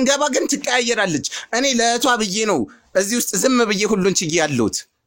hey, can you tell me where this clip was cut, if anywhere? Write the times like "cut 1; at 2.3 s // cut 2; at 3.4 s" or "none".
none